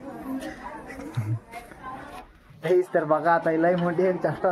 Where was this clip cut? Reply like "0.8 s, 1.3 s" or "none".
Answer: none